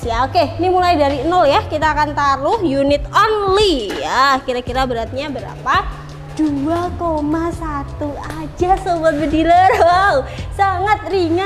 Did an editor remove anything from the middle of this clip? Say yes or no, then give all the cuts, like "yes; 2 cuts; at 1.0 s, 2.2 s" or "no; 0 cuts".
no; 0 cuts